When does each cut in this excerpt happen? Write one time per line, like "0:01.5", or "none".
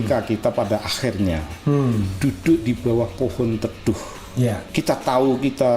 0:04.6